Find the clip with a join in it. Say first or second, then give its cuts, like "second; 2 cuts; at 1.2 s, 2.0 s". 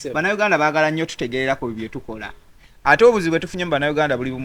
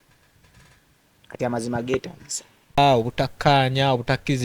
second; 1 cut; at 2.8 s